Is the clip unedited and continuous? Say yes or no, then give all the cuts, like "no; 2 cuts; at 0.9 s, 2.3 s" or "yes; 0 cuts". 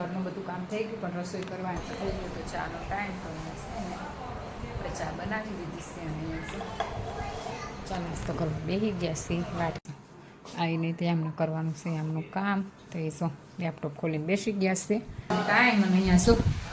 no; 4 cuts; at 1.8 s, 3.4 s, 9.8 s, 15.3 s